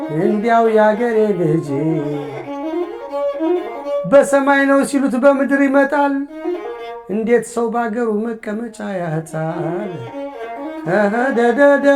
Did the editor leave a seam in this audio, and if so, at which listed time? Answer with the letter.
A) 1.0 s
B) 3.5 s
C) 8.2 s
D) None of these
D